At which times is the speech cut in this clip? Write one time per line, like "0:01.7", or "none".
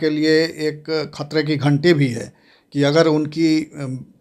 none